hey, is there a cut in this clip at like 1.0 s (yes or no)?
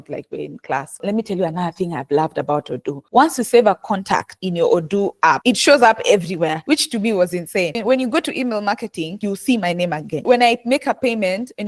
yes